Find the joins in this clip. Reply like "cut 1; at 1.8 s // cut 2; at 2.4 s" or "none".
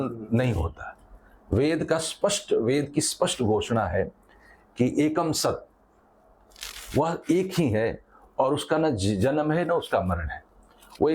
none